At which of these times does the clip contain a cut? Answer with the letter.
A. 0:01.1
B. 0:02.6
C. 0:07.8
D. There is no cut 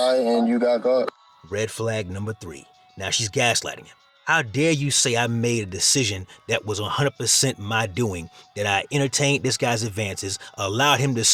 D